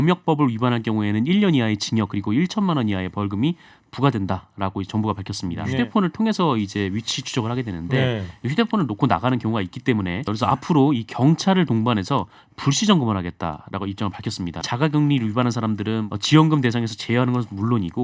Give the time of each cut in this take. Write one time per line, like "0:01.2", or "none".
0:05.7
0:10.3
0:14.6
0:16.1

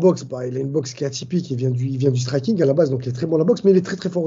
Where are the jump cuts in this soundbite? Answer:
none

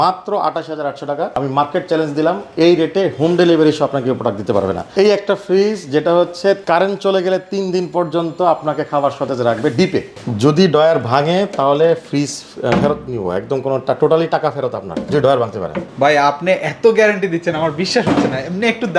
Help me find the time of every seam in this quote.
0:04.9
0:10.1

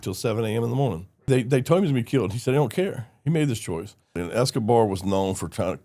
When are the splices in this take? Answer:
0:01.2
0:04.2

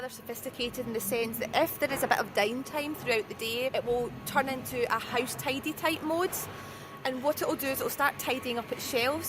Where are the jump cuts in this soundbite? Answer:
0:03.7

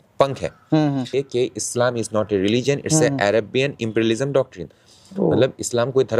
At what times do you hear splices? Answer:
0:01.1

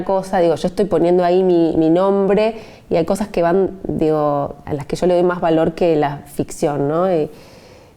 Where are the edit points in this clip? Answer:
none

